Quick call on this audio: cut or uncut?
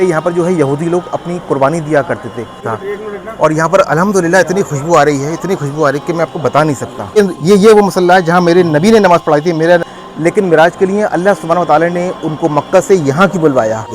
cut